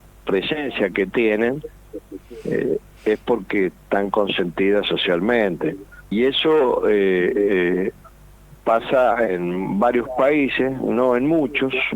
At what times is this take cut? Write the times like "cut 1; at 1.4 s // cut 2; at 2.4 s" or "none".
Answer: cut 1; at 5.9 s